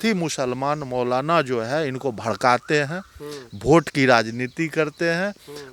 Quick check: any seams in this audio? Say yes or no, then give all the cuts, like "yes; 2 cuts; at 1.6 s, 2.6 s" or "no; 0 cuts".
no; 0 cuts